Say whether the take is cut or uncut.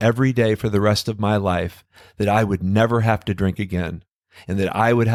uncut